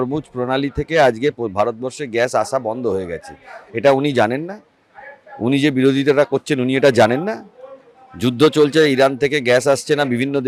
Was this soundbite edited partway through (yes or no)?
no